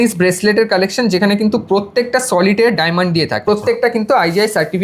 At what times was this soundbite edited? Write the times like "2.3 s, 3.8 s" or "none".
3.5 s